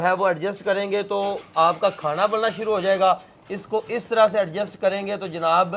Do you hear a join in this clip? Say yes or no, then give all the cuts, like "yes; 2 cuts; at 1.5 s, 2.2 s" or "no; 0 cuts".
no; 0 cuts